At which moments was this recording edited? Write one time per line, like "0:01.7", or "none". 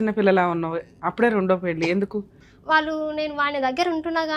0:02.4